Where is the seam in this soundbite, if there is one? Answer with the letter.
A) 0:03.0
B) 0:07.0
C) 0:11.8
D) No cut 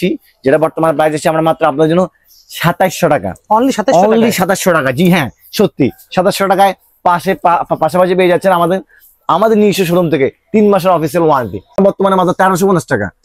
C